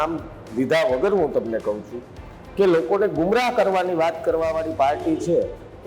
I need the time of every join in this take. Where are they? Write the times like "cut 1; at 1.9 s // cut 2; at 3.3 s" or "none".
none